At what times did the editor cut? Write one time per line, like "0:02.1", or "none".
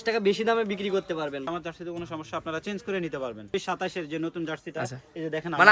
0:01.5
0:03.5

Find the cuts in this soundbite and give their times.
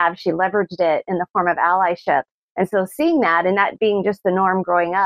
none

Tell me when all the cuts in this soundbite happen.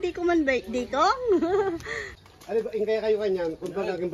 0:02.1

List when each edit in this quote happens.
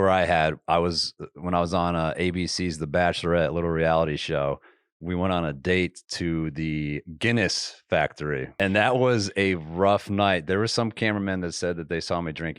0:08.5

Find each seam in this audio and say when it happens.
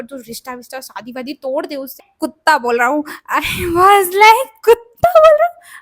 0:02.1

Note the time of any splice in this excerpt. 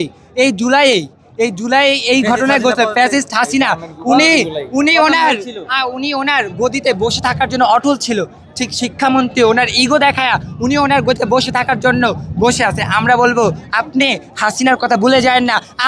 none

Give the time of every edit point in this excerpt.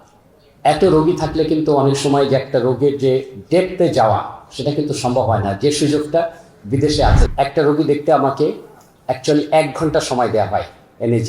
0:07.2

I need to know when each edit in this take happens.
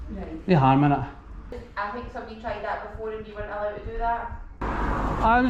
0:01.6
0:04.6

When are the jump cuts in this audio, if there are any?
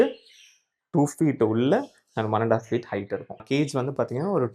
0:03.4

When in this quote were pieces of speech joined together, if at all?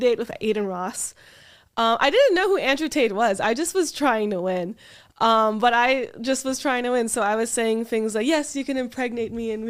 none

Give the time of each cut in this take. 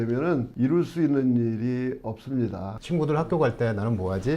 0:02.8

